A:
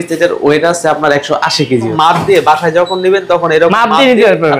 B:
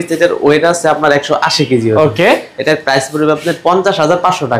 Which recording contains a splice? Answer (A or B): A